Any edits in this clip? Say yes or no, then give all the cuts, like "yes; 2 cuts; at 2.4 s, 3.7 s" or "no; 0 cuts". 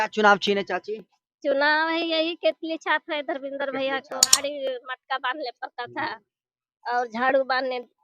yes; 1 cut; at 4.2 s